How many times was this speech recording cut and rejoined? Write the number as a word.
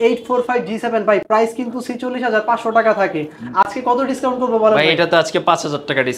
zero